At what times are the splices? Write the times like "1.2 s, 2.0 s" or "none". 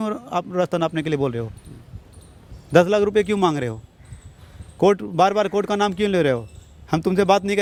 none